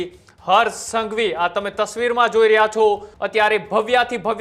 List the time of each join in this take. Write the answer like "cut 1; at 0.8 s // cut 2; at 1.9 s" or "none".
cut 1; at 3.1 s